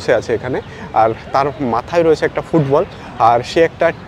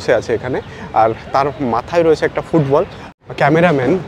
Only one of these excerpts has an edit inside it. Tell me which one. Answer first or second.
second